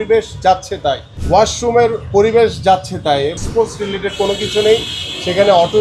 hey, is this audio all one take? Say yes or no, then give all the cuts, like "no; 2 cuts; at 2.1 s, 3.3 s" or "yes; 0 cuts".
no; 2 cuts; at 1.1 s, 3.3 s